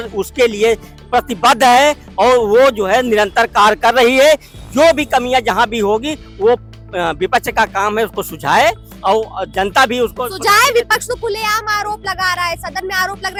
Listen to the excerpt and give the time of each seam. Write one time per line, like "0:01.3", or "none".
none